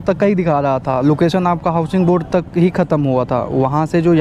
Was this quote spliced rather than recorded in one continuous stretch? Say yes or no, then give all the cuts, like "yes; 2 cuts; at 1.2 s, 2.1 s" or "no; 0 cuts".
no; 0 cuts